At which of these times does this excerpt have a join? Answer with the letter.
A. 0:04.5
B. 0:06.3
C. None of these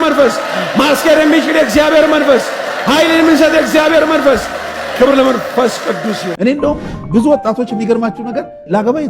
B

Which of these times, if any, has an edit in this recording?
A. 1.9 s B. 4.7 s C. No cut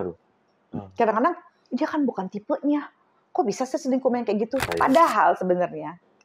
B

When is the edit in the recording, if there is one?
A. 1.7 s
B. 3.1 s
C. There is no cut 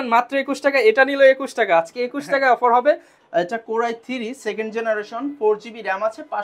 B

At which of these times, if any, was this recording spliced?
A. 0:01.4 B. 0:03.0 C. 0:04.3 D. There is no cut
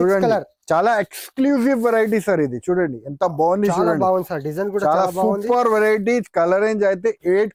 D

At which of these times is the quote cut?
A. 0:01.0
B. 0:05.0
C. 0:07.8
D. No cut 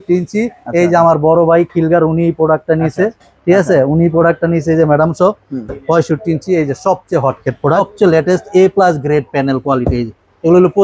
C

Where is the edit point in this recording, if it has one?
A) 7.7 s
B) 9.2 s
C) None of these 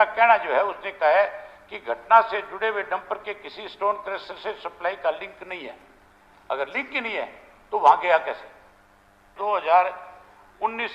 B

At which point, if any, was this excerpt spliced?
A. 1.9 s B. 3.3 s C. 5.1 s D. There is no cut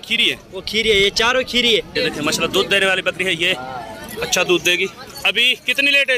A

